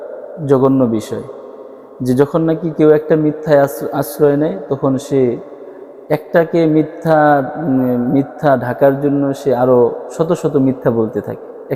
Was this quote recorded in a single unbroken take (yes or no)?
yes